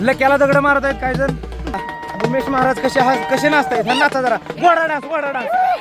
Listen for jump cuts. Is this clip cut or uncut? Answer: cut